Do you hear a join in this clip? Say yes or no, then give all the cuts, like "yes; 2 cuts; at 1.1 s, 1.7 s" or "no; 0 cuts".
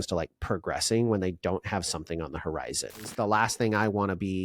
yes; 1 cut; at 3.1 s